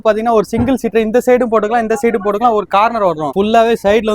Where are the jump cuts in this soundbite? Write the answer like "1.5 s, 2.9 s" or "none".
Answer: 3.3 s